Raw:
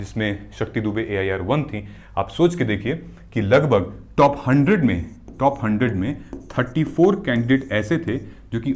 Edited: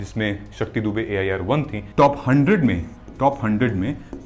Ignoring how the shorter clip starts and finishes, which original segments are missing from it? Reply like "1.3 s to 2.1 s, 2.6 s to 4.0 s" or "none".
1.8 s to 4.0 s

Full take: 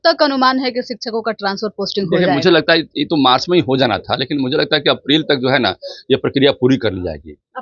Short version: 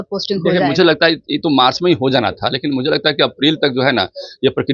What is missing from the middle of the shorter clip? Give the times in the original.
none

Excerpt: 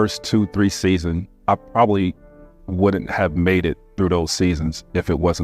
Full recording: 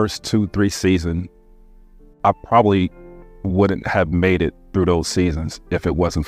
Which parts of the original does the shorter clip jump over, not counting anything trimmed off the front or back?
1.3 s to 2.1 s

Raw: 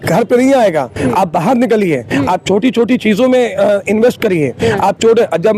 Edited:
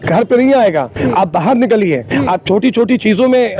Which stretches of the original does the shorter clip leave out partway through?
none

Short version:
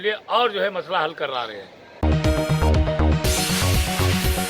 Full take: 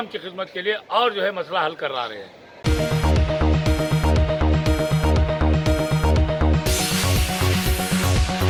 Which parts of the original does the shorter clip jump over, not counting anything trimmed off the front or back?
2.6 s to 5.4 s

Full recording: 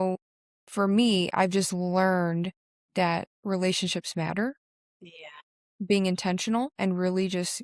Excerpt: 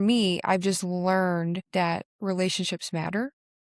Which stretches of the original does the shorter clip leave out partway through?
2.7 s to 3.1 s

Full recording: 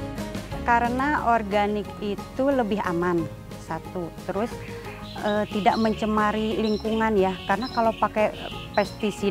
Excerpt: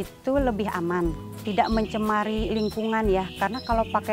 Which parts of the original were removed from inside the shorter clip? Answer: 3.6 s to 5.5 s

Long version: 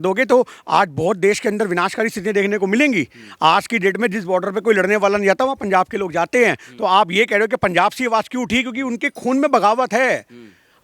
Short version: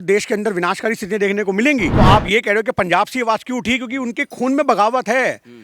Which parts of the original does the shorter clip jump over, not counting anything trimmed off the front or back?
3.0 s to 6.7 s

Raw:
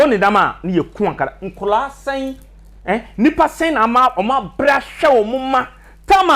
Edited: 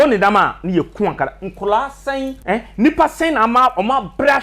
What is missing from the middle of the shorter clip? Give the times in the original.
2.4 s to 2.8 s

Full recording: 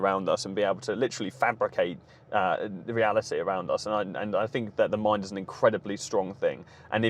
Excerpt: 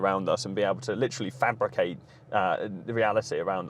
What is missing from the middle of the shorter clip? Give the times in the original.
none

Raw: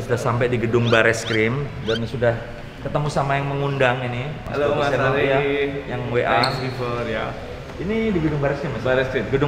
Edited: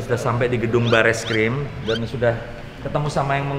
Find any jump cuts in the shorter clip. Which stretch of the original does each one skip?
none

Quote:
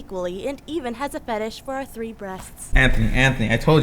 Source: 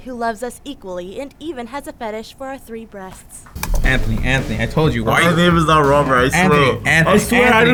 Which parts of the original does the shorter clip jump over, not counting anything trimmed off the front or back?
3.5 s to 3.8 s

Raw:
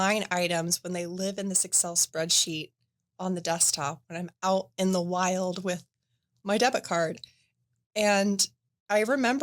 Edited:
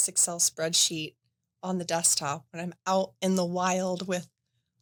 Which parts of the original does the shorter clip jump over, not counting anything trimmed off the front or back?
none

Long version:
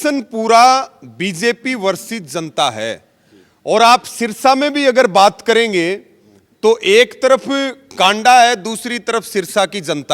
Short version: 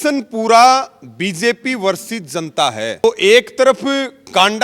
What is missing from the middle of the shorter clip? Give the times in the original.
3.0 s to 6.7 s

